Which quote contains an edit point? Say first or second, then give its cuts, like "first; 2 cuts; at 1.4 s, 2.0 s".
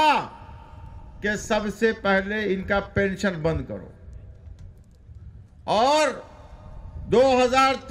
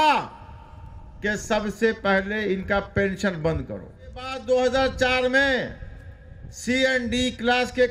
second; 1 cut; at 4.3 s